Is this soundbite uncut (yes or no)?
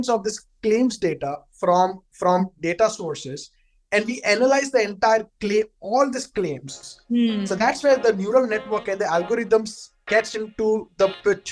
yes